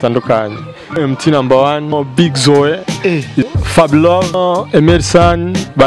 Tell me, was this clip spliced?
yes; 4 cuts; at 1.0 s, 1.9 s, 3.5 s, 4.3 s

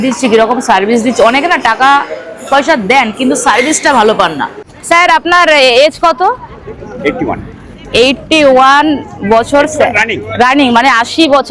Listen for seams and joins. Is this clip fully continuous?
no; 1 cut; at 4.7 s

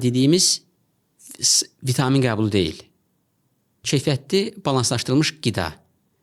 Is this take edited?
no; 0 cuts

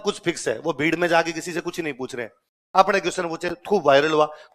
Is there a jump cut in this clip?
no; 0 cuts

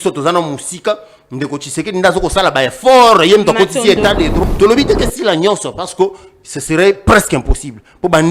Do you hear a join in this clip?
yes; 1 cut; at 4.4 s

